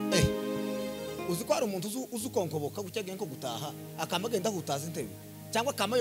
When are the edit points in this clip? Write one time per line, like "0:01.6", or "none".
0:01.2